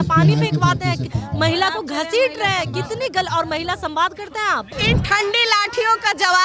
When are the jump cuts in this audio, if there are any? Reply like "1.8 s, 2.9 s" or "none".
4.7 s

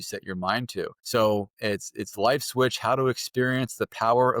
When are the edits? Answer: 1.0 s

